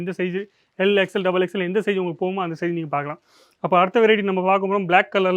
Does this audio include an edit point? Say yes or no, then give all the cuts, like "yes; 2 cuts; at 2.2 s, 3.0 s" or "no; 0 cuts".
no; 0 cuts